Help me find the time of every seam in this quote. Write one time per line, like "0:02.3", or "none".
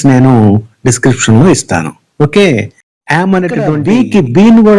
0:03.8